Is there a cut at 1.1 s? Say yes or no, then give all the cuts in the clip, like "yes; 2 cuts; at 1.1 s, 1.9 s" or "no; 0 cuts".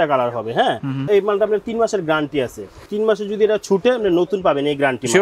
yes; 2 cuts; at 1.1 s, 2.8 s